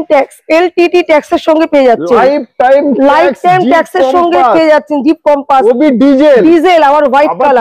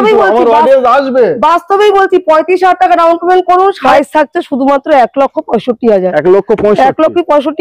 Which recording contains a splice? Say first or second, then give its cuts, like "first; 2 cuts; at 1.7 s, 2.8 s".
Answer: second; 1 cut; at 3.8 s